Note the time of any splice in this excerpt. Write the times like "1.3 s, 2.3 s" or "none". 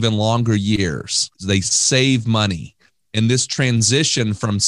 1.3 s